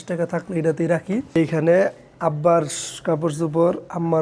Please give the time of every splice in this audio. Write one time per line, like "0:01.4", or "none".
0:01.3